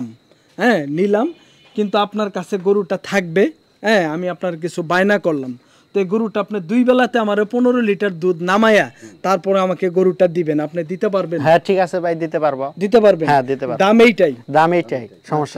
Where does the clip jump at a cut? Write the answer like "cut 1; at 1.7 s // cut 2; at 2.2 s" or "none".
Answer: none